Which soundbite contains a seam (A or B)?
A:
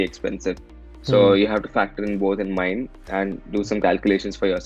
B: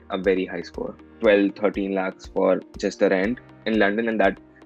B